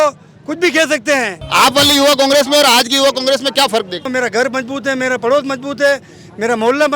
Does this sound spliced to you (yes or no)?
yes